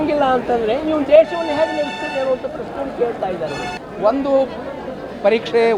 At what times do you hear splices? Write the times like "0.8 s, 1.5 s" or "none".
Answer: 3.8 s